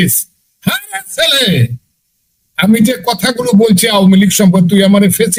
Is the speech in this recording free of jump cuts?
yes; 0 cuts

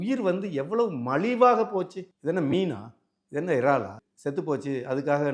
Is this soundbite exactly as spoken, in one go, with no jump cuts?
no; 2 cuts; at 2.0 s, 4.0 s

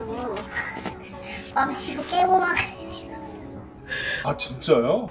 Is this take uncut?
no; 1 cut; at 3.8 s

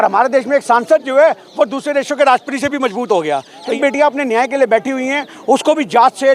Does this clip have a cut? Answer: yes; 1 cut; at 3.8 s

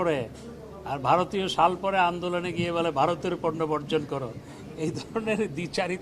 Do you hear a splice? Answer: no; 0 cuts

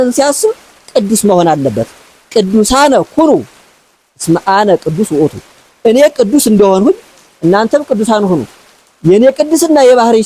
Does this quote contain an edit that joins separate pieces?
no; 0 cuts

